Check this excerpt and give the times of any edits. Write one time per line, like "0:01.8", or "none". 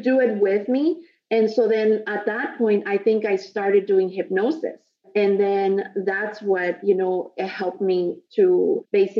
none